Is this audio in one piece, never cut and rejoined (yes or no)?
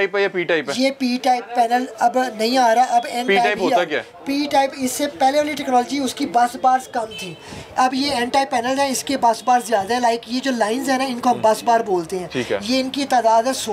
yes